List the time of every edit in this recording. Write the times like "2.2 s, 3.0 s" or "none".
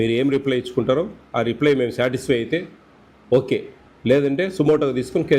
none